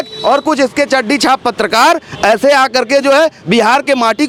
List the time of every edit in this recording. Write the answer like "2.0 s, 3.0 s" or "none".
none